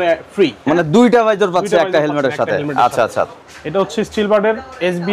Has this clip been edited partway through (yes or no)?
no